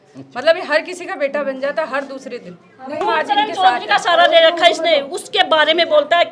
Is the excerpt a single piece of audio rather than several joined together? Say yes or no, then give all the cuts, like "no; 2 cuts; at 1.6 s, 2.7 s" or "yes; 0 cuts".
no; 1 cut; at 3.0 s